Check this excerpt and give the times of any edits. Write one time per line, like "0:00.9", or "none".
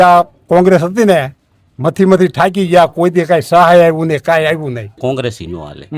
0:04.8